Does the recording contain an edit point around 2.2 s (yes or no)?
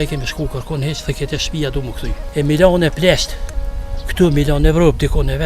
yes